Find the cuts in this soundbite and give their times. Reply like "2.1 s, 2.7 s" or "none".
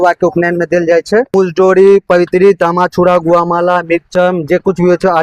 1.3 s